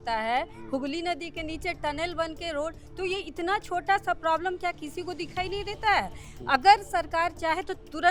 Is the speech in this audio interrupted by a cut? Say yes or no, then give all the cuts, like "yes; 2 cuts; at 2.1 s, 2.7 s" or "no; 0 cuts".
no; 0 cuts